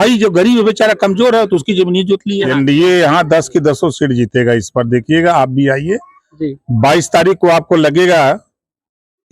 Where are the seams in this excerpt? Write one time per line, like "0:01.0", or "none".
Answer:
0:02.4